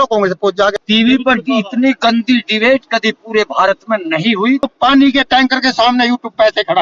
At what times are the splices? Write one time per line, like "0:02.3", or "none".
0:00.7
0:04.7